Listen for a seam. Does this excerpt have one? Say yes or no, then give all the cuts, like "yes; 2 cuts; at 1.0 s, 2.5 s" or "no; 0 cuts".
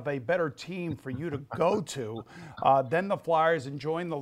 no; 0 cuts